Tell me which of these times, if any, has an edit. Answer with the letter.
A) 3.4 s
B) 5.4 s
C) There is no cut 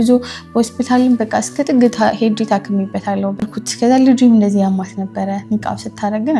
A